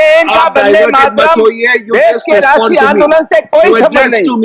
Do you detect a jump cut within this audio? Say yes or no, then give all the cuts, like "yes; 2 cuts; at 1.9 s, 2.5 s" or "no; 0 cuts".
no; 0 cuts